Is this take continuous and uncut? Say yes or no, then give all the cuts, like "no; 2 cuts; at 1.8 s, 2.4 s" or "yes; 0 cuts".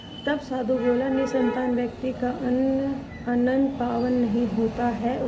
yes; 0 cuts